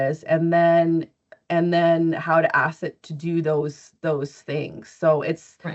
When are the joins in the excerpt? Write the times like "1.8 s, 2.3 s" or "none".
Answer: none